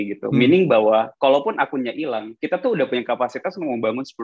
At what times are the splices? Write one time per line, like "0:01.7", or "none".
none

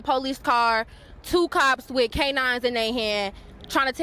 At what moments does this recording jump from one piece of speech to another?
none

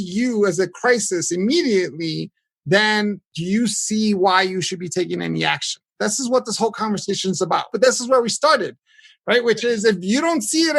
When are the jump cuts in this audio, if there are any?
0:03.3
0:05.8
0:07.7

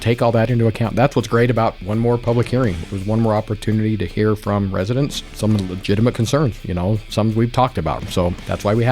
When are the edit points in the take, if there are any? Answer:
0:01.8
0:05.2
0:08.0

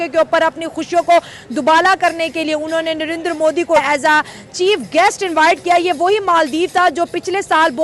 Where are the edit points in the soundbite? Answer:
0:03.8

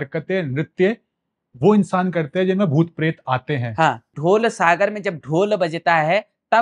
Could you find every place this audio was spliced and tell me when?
0:04.1

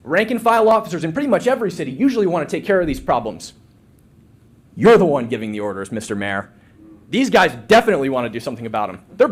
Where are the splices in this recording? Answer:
none

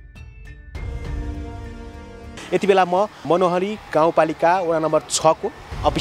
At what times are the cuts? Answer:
0:02.4
0:03.2

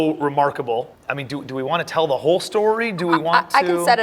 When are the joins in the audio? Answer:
0:00.9

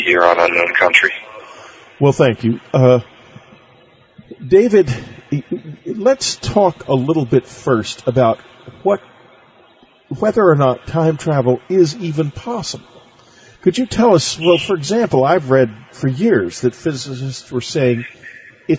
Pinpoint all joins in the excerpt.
0:15.9

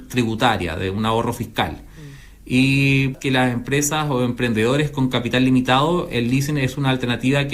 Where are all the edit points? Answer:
0:03.1

